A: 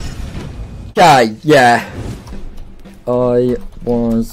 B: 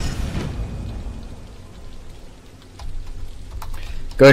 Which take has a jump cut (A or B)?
A